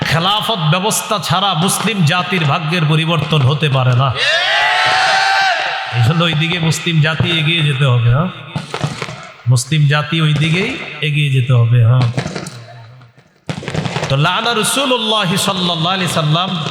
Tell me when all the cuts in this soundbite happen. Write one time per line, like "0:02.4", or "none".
none